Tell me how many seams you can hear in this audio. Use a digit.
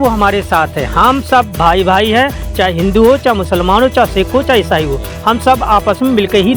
0